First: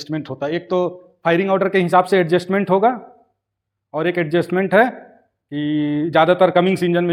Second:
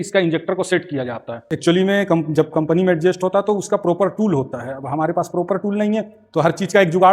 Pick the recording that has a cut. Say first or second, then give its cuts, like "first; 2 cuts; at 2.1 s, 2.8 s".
second; 1 cut; at 1.5 s